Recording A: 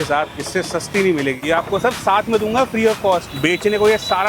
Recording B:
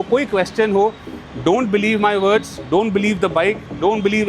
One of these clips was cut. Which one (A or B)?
A